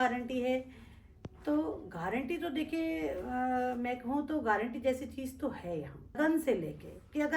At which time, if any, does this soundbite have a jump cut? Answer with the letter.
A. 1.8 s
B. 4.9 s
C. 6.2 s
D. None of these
C